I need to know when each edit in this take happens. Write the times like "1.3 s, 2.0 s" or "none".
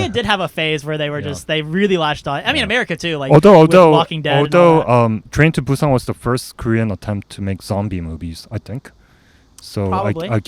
none